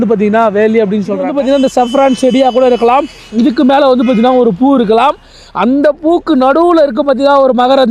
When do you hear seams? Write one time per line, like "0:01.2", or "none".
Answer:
0:01.3